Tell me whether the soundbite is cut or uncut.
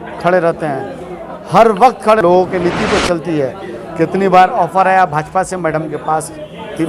cut